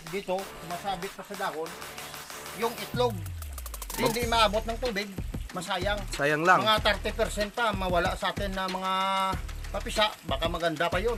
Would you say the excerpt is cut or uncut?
uncut